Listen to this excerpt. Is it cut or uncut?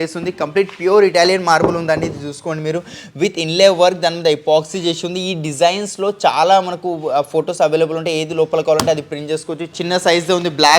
cut